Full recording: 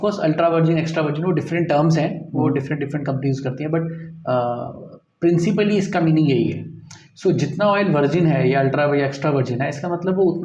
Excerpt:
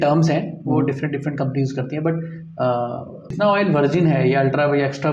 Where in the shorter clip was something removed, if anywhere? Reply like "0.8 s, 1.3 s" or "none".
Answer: 3.3 s